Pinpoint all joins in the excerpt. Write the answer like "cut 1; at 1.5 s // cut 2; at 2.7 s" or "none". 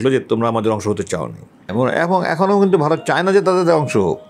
cut 1; at 1.7 s